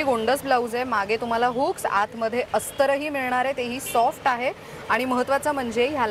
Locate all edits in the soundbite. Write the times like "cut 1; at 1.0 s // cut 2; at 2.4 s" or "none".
none